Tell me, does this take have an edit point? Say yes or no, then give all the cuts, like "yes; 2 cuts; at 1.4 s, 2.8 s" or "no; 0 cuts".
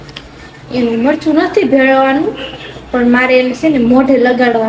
no; 0 cuts